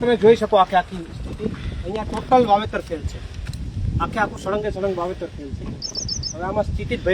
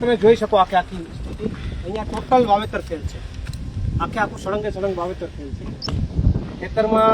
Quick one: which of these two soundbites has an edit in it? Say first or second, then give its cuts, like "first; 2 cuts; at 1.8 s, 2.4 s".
second; 1 cut; at 5.8 s